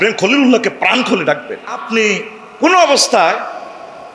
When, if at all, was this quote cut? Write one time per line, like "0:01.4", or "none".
0:01.8